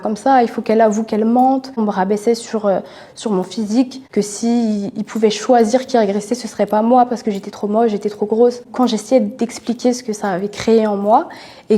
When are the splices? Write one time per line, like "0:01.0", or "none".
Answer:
0:01.8
0:04.0
0:08.7